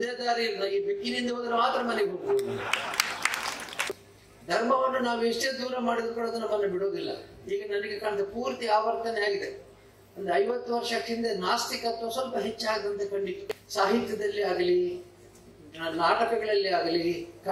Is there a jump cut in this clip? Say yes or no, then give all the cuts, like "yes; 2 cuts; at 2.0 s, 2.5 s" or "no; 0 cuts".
yes; 2 cuts; at 3.9 s, 13.5 s